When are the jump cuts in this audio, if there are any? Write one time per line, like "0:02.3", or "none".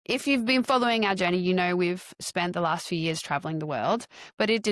none